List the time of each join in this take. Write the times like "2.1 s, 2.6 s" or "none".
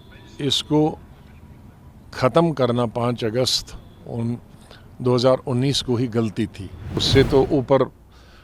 7.0 s